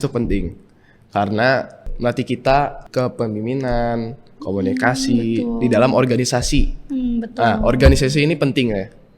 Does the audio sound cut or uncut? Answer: cut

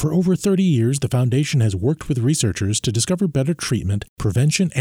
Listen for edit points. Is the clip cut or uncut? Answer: uncut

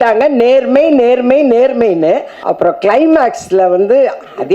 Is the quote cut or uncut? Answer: cut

